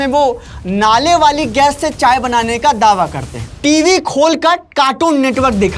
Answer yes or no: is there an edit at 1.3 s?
no